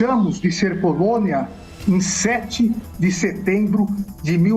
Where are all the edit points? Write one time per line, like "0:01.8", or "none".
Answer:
none